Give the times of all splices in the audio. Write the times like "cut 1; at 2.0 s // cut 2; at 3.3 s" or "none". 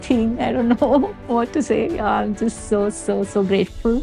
none